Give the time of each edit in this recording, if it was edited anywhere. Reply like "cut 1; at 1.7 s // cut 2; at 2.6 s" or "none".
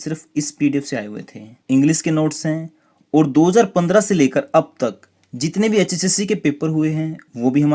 none